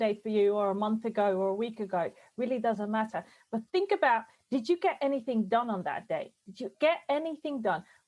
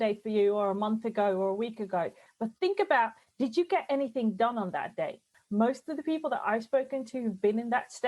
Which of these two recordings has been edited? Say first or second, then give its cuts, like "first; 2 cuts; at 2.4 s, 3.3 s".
second; 2 cuts; at 2.2 s, 5.3 s